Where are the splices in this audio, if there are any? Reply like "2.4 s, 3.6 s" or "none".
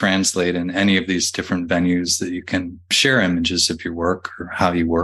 3.0 s

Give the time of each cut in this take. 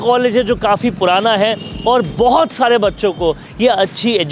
none

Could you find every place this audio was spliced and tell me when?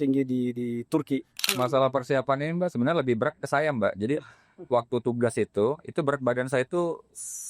1.5 s

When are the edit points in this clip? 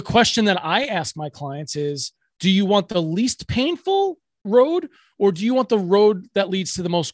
4.4 s

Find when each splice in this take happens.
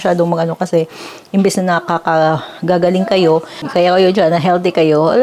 3.6 s

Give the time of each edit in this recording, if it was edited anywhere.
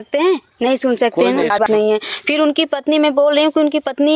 1.6 s

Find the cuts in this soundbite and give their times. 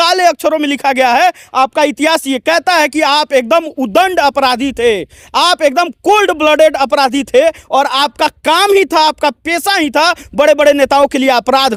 none

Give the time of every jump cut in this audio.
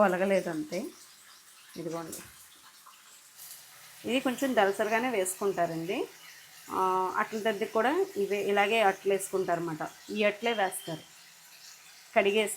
3.4 s

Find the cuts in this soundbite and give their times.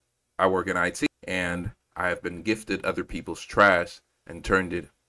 1.1 s

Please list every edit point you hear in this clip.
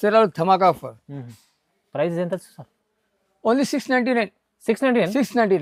none

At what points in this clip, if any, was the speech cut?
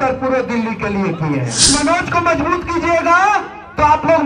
1.7 s

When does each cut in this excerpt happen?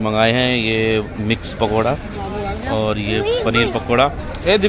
none

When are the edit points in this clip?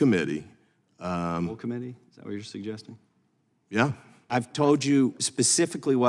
4.1 s

